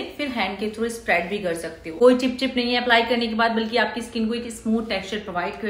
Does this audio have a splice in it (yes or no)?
no